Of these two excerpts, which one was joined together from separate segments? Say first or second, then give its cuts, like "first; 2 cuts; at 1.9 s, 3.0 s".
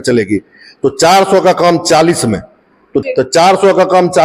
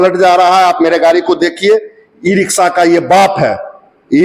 first; 1 cut; at 3.1 s